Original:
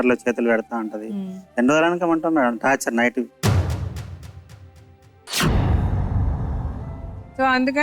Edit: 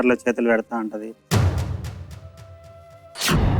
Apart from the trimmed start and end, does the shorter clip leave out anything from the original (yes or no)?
yes